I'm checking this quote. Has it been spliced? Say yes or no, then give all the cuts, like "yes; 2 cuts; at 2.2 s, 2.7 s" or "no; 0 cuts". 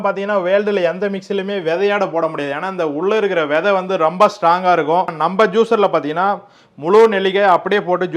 yes; 1 cut; at 5.1 s